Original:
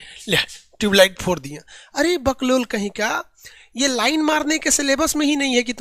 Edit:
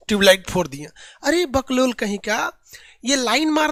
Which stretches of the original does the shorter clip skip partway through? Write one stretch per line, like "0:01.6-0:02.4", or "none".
none